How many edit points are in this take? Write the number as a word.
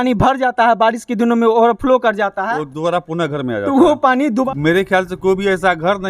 one